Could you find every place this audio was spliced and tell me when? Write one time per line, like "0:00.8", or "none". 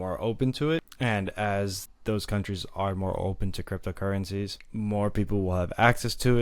0:00.9
0:01.9
0:04.6